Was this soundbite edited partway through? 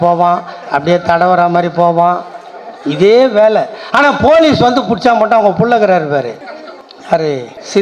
no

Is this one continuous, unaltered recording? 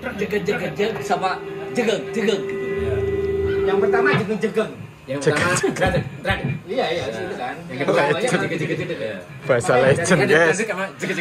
yes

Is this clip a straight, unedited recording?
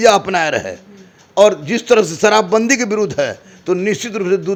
yes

